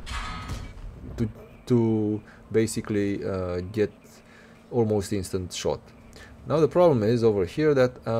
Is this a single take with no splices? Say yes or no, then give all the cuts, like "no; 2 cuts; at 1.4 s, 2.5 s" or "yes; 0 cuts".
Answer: yes; 0 cuts